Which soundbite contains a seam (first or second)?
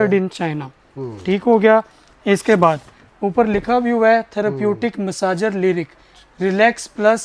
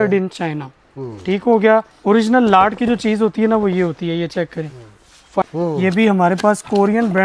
second